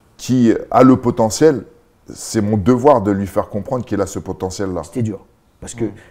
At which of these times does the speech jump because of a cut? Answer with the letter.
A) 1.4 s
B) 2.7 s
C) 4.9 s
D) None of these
C